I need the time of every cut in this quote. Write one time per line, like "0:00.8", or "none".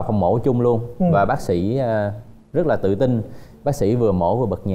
none